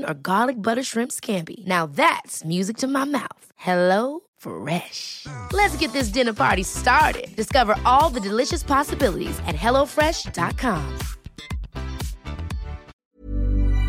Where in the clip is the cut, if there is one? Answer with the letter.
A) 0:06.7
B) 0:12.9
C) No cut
B